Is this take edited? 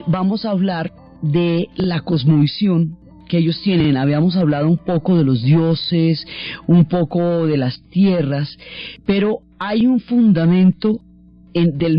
no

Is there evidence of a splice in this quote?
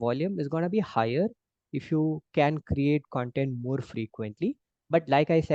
no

